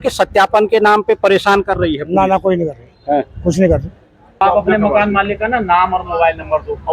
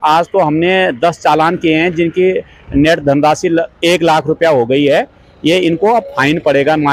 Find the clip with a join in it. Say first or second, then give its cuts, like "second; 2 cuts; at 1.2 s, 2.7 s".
first; 1 cut; at 4.4 s